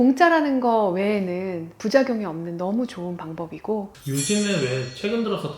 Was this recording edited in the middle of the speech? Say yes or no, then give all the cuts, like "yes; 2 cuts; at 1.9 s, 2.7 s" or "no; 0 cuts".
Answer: yes; 1 cut; at 3.9 s